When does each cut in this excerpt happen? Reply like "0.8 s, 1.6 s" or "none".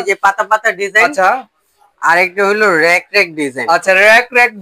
none